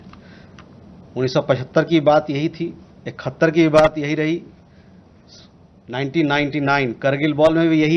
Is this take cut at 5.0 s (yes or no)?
no